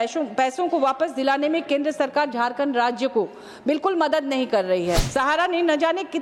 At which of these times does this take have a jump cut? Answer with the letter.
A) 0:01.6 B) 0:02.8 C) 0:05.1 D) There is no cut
C